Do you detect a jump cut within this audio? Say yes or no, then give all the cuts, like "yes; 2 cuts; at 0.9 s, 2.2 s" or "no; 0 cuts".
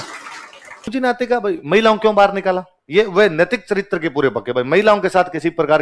yes; 1 cut; at 0.9 s